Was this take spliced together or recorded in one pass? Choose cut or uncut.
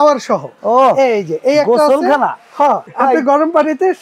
cut